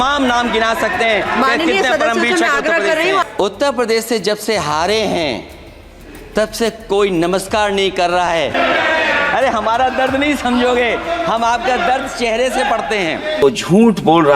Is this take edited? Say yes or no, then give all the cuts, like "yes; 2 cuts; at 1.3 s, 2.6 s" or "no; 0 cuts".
yes; 3 cuts; at 3.3 s, 8.5 s, 13.4 s